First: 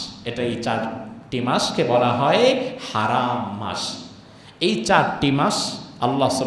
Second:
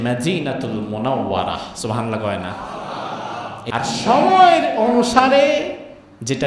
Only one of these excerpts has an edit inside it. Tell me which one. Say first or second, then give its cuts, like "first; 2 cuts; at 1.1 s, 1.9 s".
second; 1 cut; at 3.7 s